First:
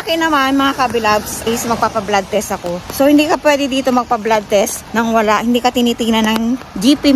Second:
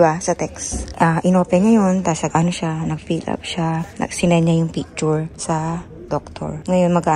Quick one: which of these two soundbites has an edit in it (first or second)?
first